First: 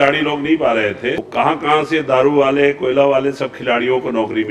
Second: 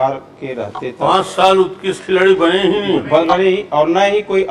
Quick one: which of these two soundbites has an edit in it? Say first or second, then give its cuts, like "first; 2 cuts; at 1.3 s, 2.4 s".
first; 1 cut; at 1.2 s